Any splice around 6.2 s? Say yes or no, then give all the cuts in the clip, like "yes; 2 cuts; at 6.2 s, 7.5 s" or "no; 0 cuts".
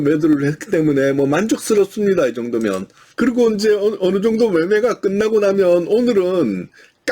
no; 1 cut; at 3.0 s